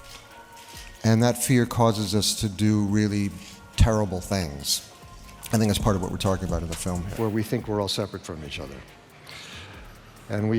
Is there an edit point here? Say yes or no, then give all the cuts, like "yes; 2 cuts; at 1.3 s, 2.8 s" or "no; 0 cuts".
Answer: yes; 1 cut; at 7.1 s